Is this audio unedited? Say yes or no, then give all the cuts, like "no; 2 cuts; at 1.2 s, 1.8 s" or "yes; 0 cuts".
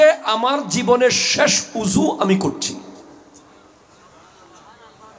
yes; 0 cuts